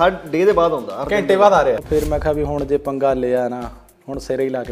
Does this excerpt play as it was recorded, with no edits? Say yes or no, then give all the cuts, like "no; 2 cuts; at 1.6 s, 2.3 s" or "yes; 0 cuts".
no; 1 cut; at 1.8 s